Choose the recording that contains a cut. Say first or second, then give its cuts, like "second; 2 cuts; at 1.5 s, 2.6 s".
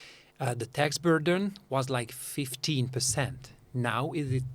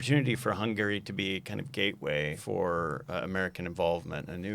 second; 1 cut; at 2.4 s